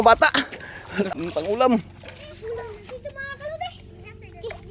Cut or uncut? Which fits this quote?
cut